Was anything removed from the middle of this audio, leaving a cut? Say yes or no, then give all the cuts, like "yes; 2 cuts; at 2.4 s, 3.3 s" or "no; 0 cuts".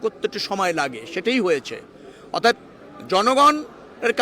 no; 0 cuts